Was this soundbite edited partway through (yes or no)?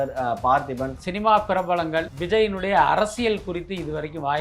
yes